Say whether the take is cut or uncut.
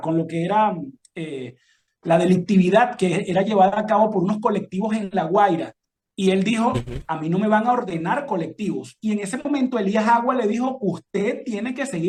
uncut